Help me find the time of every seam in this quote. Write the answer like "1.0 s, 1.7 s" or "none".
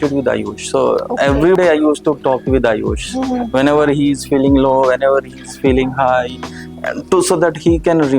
1.6 s